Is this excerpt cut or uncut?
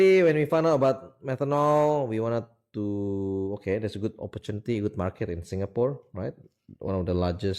uncut